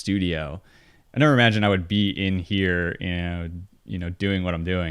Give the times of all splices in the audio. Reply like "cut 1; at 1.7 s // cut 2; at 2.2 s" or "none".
cut 1; at 1.0 s